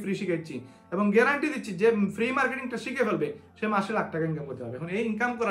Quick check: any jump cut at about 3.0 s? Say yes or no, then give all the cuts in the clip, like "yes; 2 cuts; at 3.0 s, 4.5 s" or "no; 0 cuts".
no; 0 cuts